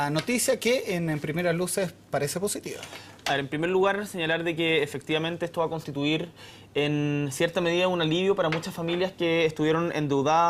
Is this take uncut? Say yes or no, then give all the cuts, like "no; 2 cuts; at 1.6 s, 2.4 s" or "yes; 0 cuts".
yes; 0 cuts